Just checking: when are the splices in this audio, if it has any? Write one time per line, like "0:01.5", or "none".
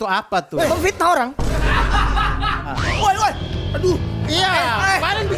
0:02.7